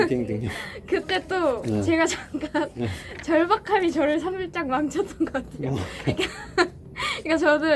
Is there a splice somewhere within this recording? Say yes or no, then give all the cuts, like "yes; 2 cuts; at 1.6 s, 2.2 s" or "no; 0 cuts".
no; 0 cuts